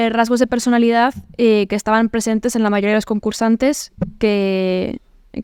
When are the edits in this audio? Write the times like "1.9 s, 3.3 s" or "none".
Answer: none